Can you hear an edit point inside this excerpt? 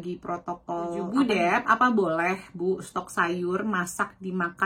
yes; 1 cut; at 1.0 s

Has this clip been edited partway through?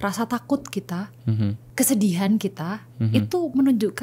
no; 0 cuts

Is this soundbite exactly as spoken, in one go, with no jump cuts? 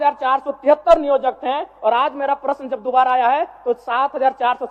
yes; 0 cuts

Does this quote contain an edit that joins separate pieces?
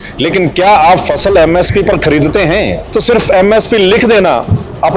yes; 1 cut; at 2.8 s

